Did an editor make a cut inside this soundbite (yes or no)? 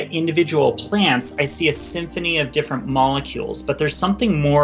no